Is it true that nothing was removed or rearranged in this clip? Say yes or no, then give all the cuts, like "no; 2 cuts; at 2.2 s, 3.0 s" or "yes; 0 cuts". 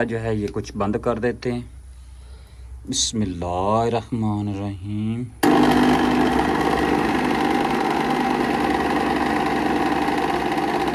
yes; 0 cuts